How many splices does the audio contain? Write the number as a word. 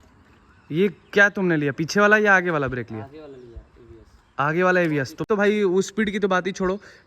one